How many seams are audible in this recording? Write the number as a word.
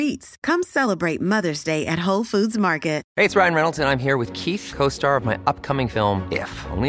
one